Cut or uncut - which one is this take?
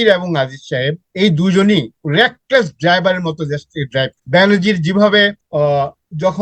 cut